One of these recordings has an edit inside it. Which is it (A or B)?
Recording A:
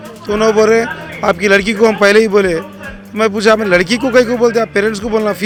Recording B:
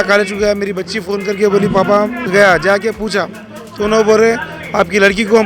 B